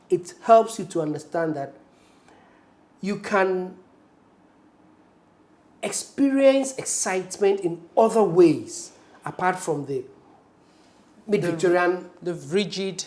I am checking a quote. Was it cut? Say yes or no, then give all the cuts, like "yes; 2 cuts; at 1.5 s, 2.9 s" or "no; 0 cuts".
no; 0 cuts